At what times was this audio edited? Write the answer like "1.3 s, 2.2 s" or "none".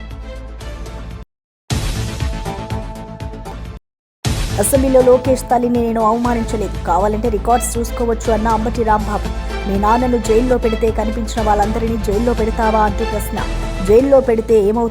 1.2 s